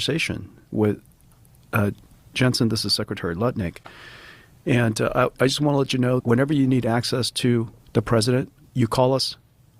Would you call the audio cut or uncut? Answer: cut